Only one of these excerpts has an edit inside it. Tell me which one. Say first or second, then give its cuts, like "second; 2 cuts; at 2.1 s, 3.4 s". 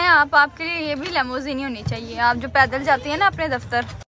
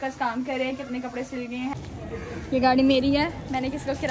second; 1 cut; at 1.7 s